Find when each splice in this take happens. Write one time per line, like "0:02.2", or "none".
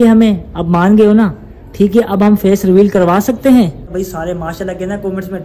0:03.7